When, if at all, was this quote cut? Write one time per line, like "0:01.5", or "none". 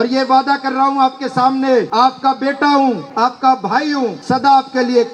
0:01.9
0:03.1
0:04.2